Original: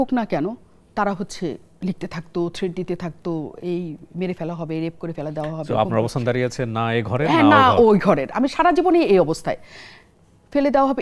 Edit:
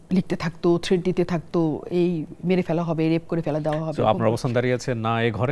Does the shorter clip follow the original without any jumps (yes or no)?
yes